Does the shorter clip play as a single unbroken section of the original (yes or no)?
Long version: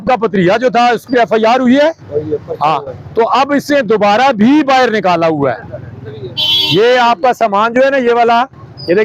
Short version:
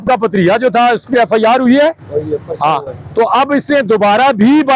yes